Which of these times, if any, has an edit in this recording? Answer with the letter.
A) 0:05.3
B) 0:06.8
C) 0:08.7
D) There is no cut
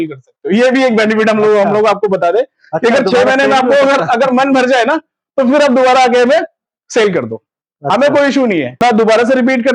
C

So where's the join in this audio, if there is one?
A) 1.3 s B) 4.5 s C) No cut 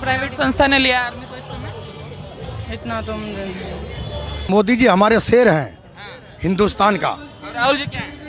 B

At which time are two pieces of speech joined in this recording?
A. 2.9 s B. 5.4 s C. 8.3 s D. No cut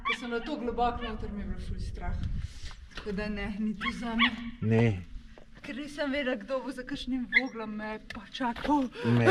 D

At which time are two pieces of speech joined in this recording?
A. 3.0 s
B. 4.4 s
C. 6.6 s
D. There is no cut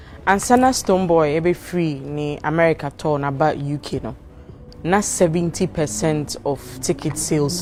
D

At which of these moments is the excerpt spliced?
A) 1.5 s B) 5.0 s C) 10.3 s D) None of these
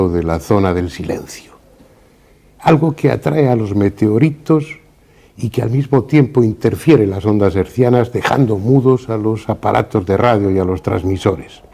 B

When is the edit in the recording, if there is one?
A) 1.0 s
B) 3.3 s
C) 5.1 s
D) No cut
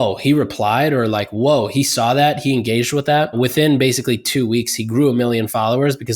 B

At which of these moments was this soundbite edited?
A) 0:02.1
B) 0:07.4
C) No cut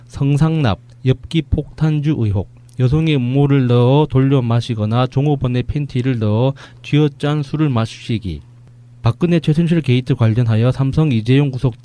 C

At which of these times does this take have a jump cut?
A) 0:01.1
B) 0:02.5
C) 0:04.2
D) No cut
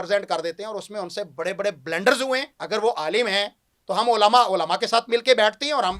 B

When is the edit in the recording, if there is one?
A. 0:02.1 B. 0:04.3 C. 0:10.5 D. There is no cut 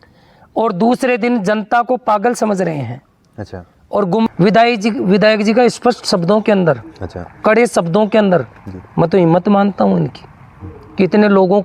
B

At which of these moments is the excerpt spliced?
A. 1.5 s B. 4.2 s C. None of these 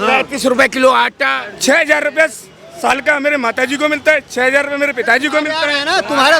A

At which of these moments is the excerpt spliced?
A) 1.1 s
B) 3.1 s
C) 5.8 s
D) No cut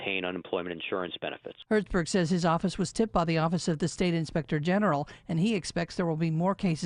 A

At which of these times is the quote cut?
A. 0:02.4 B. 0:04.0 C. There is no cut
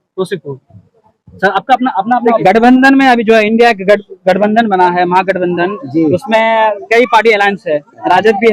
A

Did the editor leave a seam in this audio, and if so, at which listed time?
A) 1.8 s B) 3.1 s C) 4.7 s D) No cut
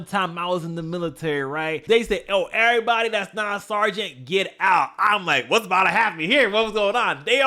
A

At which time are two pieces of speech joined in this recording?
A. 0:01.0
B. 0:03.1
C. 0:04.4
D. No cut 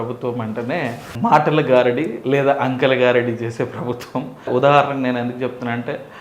D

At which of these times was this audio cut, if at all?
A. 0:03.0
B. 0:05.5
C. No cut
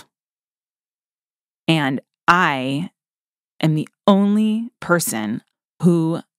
B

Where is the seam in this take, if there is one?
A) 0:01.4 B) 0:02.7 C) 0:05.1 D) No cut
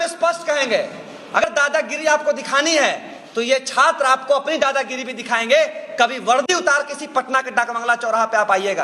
A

